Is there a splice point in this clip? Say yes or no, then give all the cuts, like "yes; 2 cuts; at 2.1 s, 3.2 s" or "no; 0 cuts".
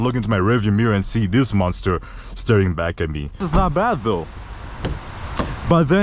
yes; 1 cut; at 3.4 s